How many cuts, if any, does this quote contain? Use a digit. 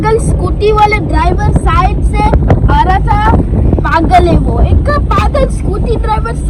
0